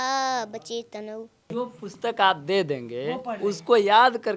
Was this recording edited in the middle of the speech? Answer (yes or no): yes